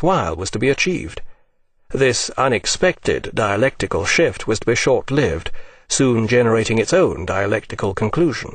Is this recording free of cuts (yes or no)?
no